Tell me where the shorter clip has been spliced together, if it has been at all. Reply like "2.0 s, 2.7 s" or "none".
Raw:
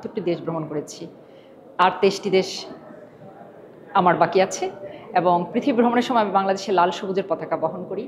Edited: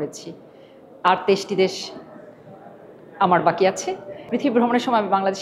4.3 s